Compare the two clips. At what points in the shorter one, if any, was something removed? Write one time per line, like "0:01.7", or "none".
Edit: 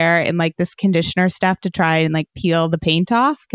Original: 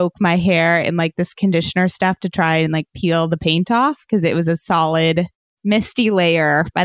none